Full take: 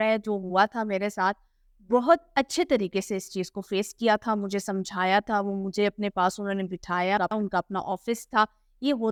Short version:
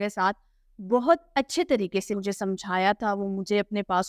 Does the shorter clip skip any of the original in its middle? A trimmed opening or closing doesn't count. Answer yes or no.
yes